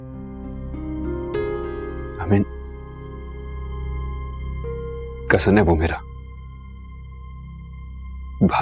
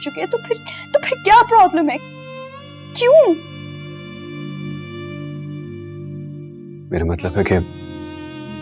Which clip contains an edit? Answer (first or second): second